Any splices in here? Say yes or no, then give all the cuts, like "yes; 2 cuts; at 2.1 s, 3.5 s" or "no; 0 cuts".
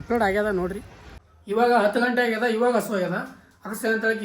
yes; 1 cut; at 1.3 s